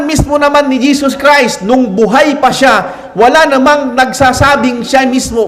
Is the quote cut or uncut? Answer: uncut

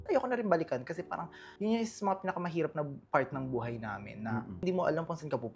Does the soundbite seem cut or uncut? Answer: cut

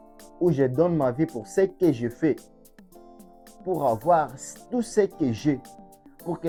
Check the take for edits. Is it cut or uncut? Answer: uncut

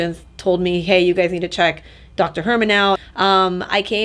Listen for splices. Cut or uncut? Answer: cut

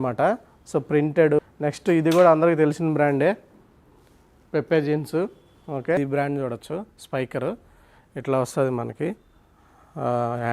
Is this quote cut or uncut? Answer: cut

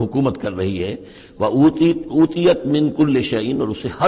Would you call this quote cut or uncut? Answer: uncut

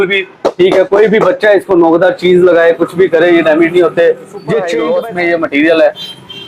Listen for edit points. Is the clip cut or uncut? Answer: cut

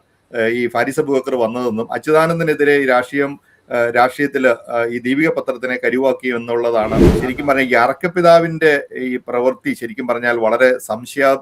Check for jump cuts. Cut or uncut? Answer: cut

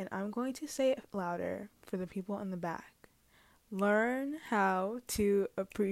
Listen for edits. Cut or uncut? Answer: uncut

